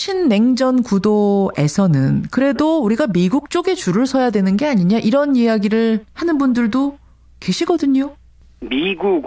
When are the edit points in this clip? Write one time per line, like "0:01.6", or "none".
none

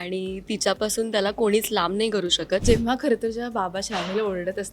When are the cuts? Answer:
0:02.6

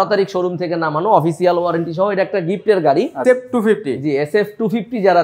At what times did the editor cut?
0:03.2

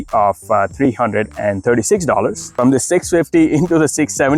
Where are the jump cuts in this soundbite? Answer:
0:02.5

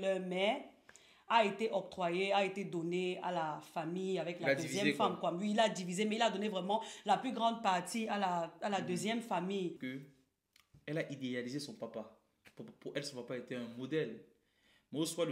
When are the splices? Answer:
0:09.8

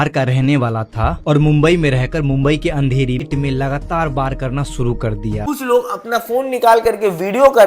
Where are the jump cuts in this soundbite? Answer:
0:03.2
0:05.4

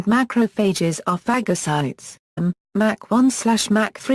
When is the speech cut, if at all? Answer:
none

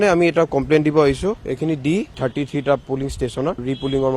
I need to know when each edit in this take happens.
0:01.3

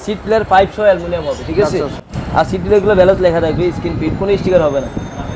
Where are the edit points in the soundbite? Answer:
none

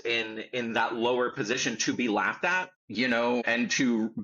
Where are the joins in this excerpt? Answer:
0:02.8
0:03.4

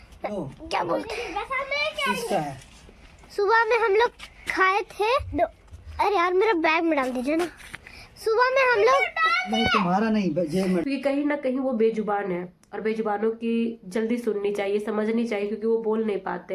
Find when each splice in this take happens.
0:10.8

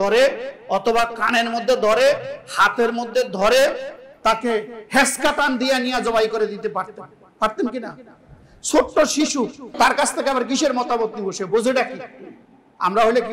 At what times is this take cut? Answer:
none

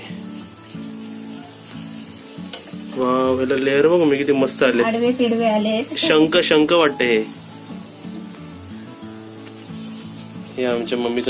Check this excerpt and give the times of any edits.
none

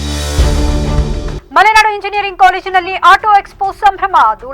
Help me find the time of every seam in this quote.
0:01.3

